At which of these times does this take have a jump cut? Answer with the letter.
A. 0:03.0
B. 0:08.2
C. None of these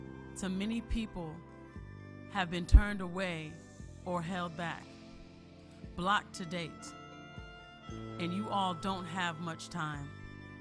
B